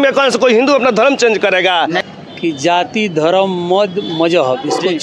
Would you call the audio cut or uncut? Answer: cut